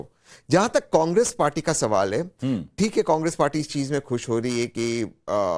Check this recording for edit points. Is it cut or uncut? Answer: uncut